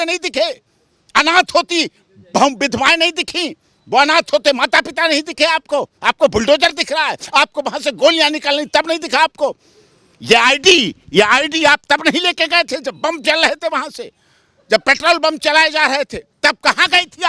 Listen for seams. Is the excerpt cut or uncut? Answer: uncut